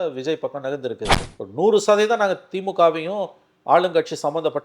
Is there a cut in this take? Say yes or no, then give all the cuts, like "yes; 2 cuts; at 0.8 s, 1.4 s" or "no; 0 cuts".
yes; 1 cut; at 1.1 s